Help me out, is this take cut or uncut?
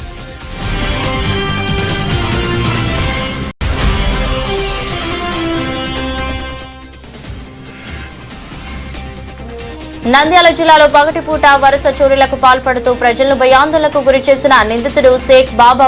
cut